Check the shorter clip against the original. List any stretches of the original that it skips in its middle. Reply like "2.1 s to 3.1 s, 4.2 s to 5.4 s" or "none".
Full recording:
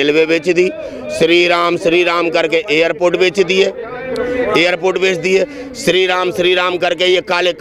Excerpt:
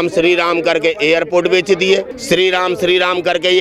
3.8 s to 5.7 s